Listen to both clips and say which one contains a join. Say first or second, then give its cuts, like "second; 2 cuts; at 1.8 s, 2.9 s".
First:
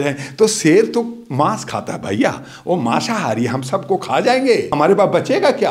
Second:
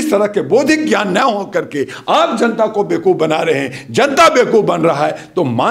first; 1 cut; at 4.7 s